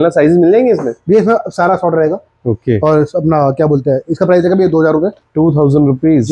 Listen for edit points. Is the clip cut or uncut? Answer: uncut